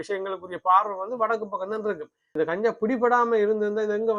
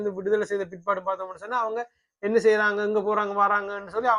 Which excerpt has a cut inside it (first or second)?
first